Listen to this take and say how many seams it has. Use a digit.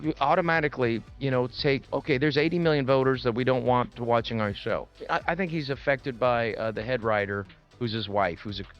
1